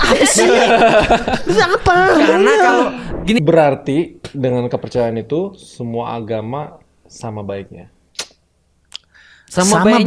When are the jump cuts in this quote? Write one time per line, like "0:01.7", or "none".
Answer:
0:03.4